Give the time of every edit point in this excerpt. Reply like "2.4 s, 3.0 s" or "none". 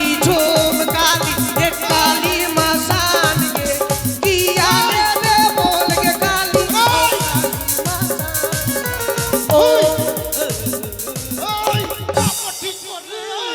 none